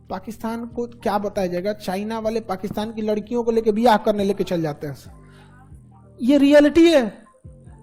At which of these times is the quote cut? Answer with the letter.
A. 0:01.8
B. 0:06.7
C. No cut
C